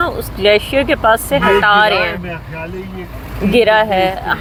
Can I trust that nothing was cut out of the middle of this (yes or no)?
yes